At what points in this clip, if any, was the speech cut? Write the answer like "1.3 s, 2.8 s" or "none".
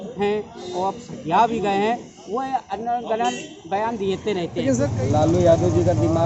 4.9 s